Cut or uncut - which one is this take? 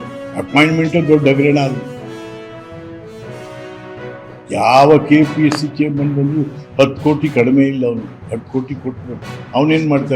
uncut